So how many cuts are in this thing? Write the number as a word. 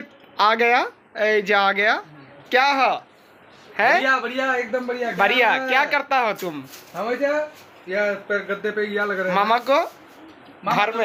zero